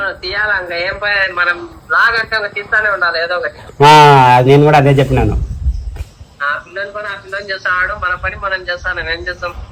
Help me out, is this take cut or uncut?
uncut